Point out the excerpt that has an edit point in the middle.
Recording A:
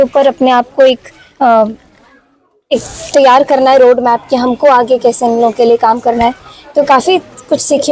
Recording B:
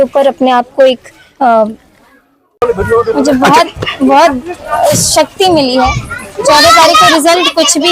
B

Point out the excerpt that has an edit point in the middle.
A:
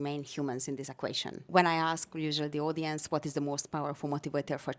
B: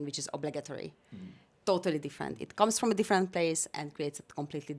A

